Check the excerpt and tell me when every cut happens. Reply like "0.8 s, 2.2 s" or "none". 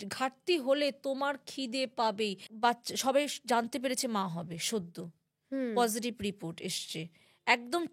2.5 s